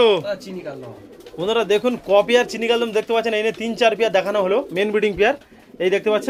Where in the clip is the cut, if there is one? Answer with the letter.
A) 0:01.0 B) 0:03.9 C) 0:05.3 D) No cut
D